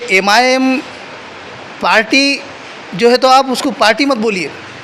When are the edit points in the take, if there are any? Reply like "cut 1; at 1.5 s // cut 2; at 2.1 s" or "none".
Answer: none

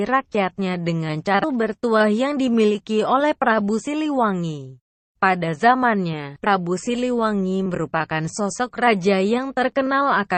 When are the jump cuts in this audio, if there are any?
none

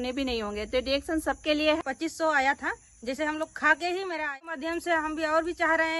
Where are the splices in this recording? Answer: cut 1; at 1.8 s // cut 2; at 4.3 s

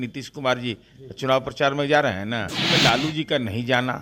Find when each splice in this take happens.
cut 1; at 2.6 s

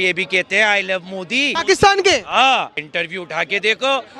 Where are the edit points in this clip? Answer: cut 1; at 1.5 s // cut 2; at 2.8 s

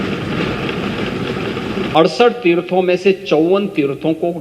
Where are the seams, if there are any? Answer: cut 1; at 1.9 s

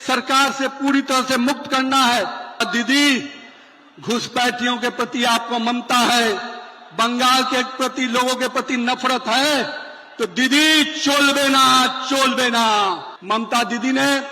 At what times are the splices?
cut 1; at 2.6 s // cut 2; at 13.1 s

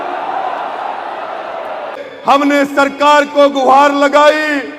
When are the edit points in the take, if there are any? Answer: cut 1; at 2.1 s

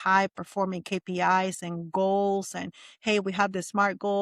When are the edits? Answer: none

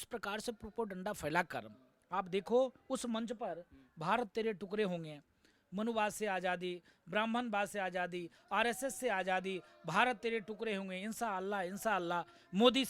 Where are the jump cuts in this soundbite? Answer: none

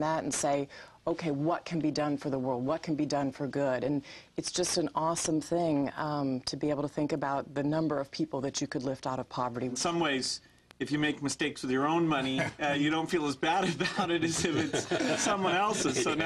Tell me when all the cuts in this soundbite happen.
cut 1; at 9.8 s

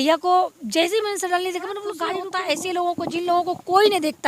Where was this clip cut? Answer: cut 1; at 2.1 s

